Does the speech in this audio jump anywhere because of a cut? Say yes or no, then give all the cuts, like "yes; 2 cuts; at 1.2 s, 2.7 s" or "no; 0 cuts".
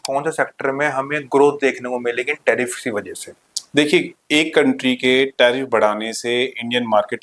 no; 0 cuts